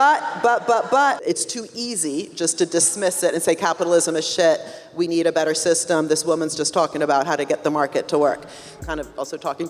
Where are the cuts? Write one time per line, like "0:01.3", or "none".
0:01.2
0:08.7